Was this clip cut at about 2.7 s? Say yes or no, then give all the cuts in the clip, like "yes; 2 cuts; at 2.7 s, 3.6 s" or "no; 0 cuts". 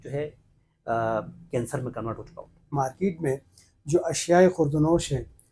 yes; 1 cut; at 2.7 s